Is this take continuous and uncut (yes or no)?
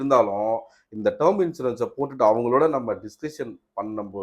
yes